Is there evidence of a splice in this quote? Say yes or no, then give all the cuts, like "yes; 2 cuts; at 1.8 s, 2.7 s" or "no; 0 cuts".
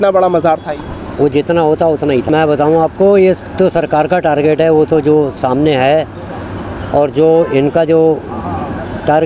yes; 1 cut; at 2.3 s